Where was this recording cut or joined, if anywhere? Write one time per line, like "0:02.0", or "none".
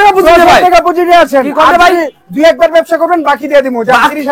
none